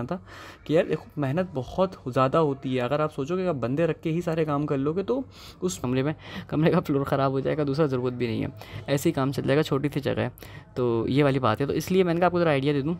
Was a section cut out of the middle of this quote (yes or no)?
yes